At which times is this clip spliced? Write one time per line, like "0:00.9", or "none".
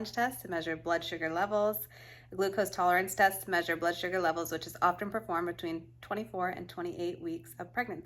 none